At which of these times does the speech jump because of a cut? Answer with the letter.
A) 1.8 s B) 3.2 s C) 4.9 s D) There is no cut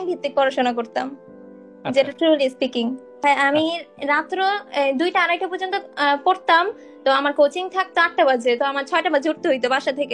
B